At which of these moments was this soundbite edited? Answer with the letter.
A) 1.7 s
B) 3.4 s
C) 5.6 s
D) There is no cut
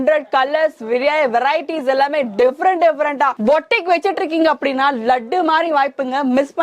B